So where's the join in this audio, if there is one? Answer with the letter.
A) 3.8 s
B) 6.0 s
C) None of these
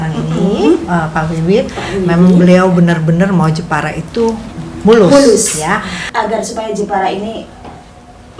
B